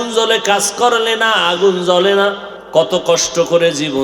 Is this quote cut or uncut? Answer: cut